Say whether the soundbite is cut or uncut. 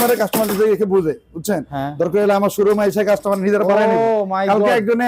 uncut